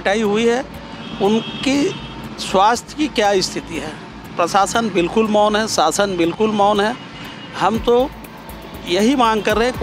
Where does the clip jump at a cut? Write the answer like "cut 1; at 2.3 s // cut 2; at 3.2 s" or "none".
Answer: none